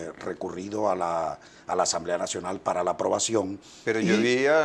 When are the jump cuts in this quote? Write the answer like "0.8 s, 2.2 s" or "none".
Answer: 3.0 s